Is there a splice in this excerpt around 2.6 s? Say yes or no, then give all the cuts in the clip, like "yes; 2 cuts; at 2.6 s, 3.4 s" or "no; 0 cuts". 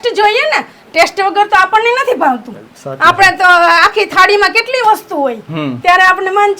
no; 0 cuts